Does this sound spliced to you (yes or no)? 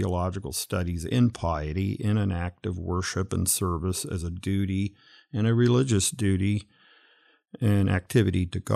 no